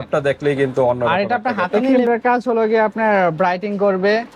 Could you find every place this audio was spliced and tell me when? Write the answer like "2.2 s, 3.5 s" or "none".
1.8 s